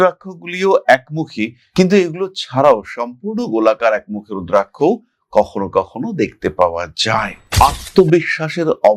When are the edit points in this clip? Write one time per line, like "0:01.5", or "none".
0:07.3